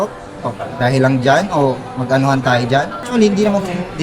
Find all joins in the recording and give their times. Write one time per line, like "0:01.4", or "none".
0:03.0